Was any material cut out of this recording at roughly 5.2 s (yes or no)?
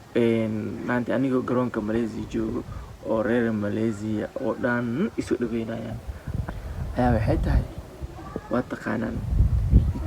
no